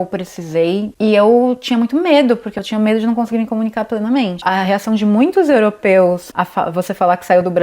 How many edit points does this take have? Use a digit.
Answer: 2